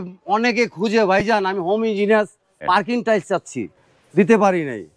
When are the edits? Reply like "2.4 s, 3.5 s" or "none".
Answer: 2.6 s, 3.7 s